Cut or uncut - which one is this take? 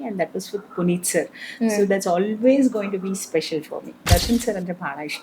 cut